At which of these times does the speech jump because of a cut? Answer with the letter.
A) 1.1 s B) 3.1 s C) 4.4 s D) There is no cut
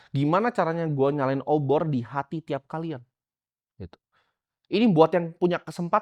D